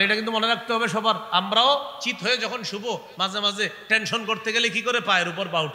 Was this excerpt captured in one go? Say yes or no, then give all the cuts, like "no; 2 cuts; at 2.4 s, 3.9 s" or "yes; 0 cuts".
yes; 0 cuts